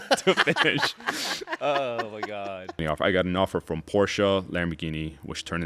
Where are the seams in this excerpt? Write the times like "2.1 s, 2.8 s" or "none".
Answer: 2.8 s